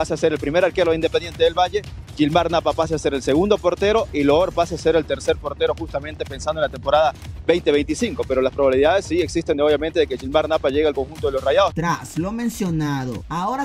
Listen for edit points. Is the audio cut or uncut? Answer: uncut